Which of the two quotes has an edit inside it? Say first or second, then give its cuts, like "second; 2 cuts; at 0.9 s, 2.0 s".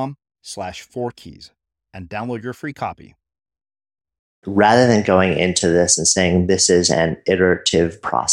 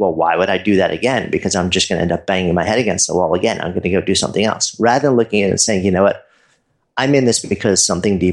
first; 1 cut; at 4.5 s